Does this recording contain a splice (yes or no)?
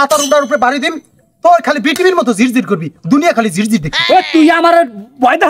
no